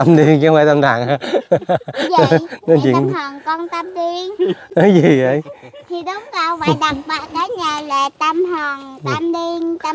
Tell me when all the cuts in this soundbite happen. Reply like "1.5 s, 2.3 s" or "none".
none